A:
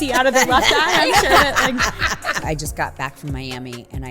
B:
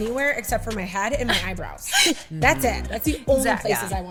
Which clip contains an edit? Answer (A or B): A